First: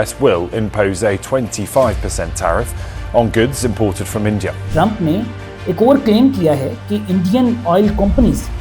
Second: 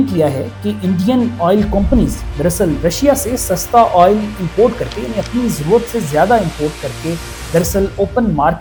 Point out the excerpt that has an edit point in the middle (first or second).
first